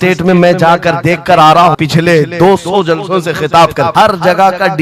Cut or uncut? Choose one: cut